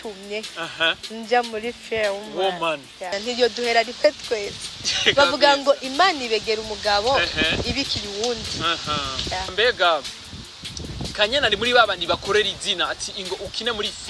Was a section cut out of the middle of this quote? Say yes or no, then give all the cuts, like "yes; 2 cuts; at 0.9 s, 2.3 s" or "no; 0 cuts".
yes; 2 cuts; at 3.1 s, 9.5 s